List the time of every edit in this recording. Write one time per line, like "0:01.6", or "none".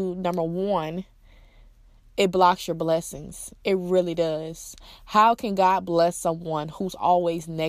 none